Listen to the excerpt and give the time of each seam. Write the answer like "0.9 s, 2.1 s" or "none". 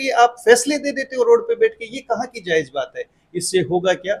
none